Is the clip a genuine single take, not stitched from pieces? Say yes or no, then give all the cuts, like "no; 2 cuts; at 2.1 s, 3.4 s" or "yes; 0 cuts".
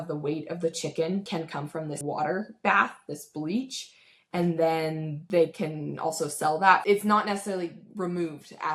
yes; 0 cuts